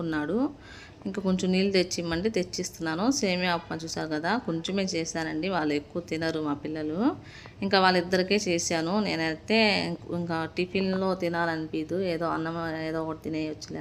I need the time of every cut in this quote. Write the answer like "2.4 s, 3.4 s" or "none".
none